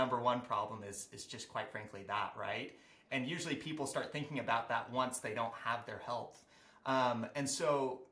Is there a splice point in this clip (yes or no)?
no